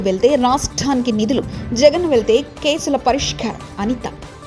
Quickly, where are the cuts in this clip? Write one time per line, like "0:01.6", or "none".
none